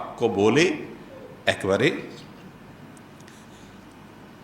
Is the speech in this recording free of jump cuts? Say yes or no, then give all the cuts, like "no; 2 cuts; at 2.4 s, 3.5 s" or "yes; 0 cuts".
no; 1 cut; at 2.8 s